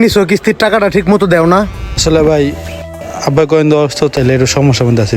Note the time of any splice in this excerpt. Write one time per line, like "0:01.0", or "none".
0:01.9
0:04.1